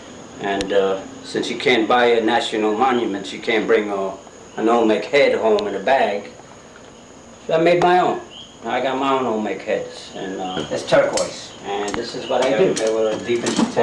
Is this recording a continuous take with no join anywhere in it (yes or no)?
no